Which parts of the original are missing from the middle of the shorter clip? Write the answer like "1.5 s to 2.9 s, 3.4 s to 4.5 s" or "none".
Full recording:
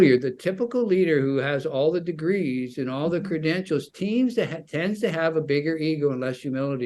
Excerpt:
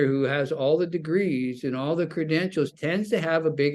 3.9 s to 4.7 s